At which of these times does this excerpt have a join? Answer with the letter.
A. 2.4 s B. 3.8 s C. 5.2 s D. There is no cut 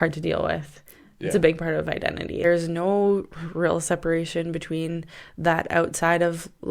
A